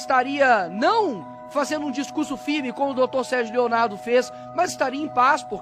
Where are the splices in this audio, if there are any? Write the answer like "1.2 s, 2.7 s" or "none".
none